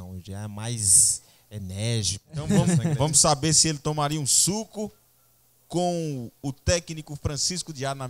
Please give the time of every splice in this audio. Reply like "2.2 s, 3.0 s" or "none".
2.4 s

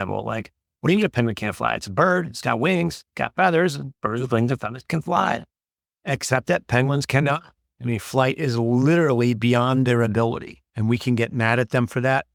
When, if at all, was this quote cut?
none

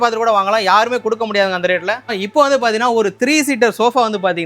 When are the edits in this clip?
2.1 s

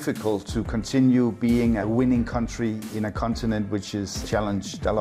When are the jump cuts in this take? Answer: 1.8 s, 2.9 s, 4.1 s

